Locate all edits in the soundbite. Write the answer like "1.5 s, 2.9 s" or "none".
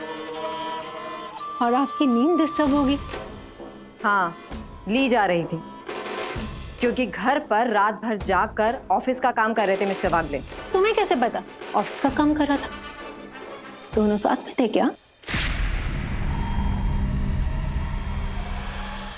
3.1 s, 11.5 s